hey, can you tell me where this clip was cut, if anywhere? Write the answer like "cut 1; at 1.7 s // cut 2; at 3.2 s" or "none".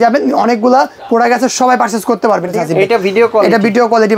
cut 1; at 2.6 s